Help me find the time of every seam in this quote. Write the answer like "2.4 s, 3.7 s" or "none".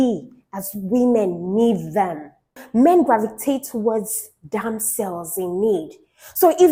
none